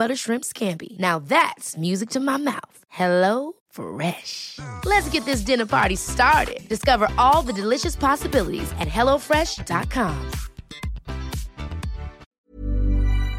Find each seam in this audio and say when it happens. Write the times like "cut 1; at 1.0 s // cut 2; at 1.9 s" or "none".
cut 1; at 12.2 s